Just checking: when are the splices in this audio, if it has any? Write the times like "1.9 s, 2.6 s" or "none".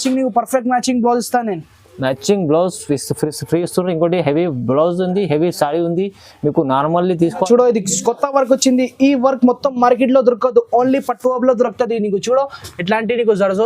7.5 s